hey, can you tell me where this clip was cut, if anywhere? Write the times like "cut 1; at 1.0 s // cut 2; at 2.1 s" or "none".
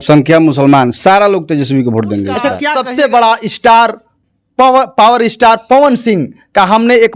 cut 1; at 2.7 s